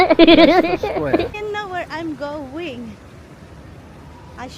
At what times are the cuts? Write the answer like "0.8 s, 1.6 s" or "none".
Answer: 1.3 s